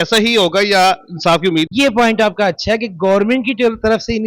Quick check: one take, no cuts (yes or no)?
no